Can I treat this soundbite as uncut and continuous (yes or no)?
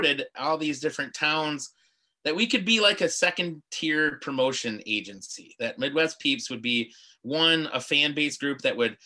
yes